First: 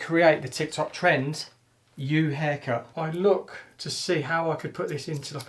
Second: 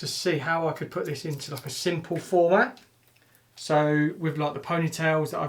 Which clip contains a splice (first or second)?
first